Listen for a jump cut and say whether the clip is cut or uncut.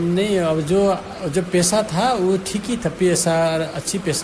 uncut